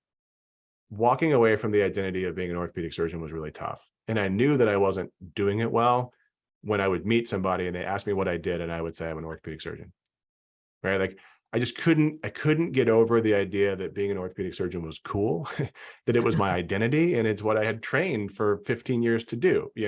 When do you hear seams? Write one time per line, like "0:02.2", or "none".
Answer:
none